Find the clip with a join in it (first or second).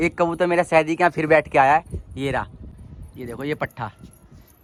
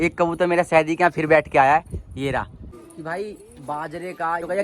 second